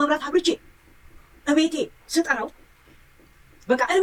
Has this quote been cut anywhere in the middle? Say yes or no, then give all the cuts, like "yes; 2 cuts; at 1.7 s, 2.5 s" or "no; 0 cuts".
no; 0 cuts